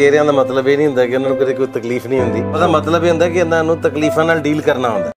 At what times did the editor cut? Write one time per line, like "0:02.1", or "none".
none